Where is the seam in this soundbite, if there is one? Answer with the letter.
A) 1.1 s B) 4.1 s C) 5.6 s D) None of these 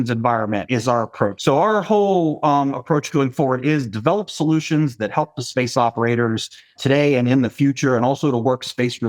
A